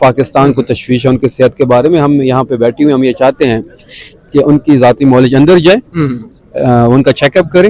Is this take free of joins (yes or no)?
yes